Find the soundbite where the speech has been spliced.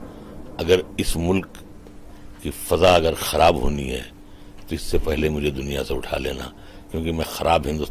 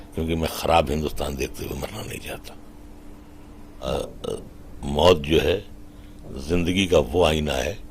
second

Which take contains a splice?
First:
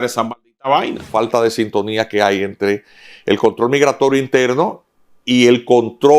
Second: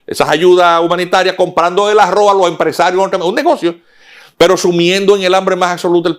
first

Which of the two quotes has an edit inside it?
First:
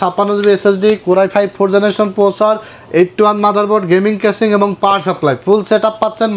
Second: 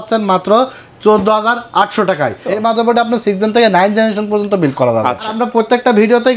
second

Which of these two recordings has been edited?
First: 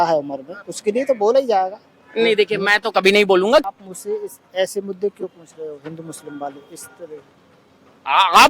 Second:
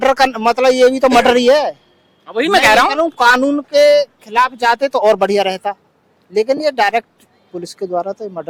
first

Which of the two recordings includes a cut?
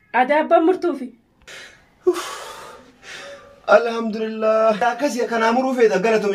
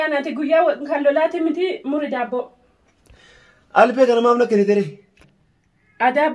first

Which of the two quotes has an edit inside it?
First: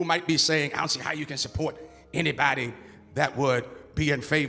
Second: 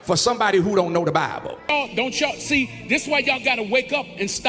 second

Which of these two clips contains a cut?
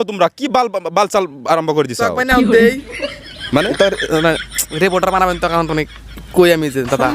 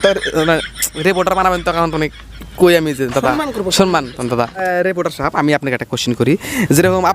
second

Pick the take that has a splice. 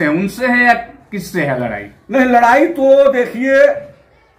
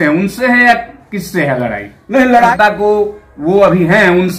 second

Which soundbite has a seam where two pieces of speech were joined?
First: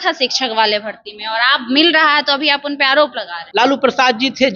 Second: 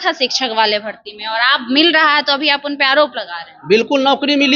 first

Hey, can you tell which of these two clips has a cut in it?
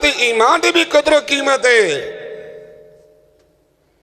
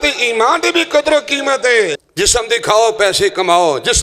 second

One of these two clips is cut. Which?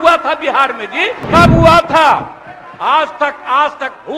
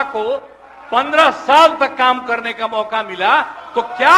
first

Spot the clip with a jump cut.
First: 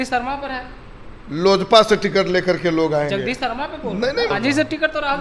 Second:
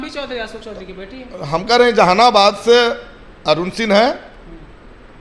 first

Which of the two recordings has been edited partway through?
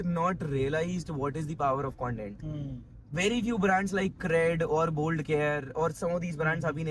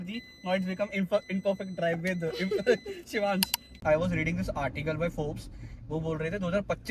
second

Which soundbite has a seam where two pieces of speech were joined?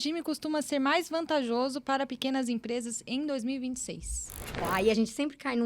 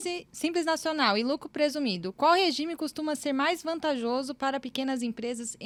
first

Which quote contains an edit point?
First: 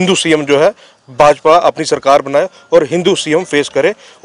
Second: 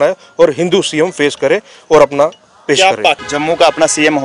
second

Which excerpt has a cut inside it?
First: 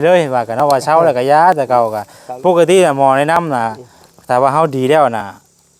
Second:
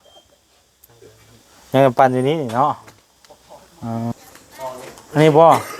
second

